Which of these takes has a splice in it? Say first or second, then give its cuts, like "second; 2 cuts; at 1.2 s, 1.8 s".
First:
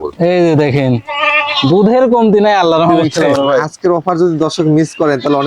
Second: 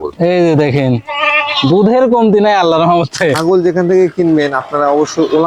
first; 1 cut; at 3.0 s